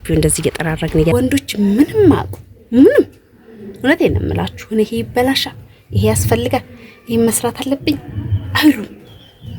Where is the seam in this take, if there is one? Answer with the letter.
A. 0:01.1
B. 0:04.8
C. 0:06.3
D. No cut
A